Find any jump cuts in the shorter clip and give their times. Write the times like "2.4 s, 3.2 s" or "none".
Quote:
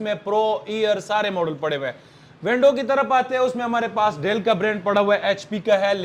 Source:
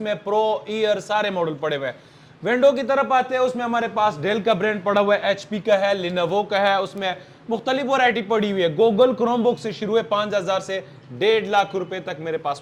none